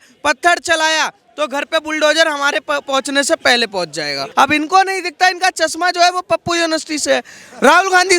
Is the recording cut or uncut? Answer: cut